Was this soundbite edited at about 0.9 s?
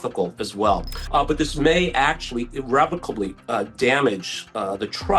yes; 1 cut; at 0.9 s

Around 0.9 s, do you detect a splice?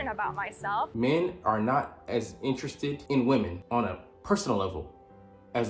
yes; 3 cuts; at 0.9 s, 3.0 s, 3.6 s

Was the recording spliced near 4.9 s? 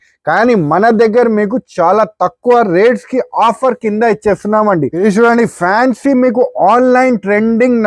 yes; 1 cut; at 4.9 s

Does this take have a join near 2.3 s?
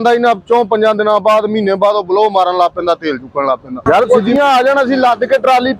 no; 1 cut; at 4.2 s

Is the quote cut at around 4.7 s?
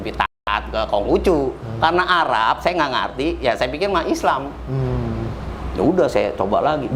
no; 0 cuts

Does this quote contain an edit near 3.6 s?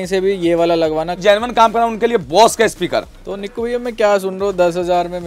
no; 1 cut; at 1.2 s

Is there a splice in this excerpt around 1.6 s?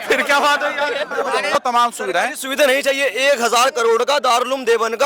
yes; 1 cut; at 1.6 s

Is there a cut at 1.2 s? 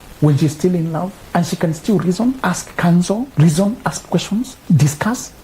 yes; 4 cuts; at 1.2 s, 2.4 s, 3.3 s, 4.6 s

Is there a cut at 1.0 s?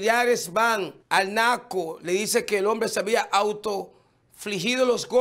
yes; 1 cut; at 1.0 s

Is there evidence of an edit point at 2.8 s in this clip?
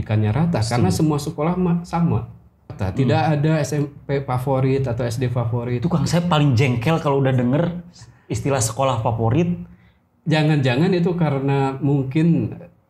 yes; 1 cut; at 2.8 s

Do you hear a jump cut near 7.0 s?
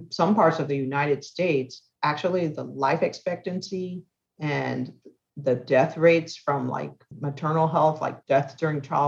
yes; 3 cuts; at 1.8 s, 7.0 s, 8.2 s

